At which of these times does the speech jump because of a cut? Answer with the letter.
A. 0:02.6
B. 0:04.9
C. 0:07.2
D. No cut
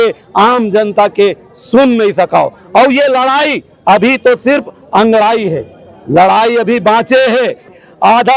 D